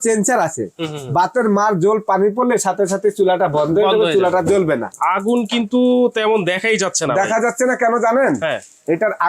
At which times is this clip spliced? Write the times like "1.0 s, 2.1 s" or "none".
4.9 s